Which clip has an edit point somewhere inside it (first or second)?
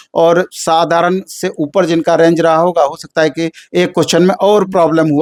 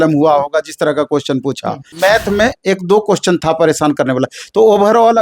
second